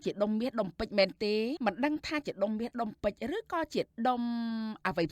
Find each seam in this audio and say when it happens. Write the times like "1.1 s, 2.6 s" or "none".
1.6 s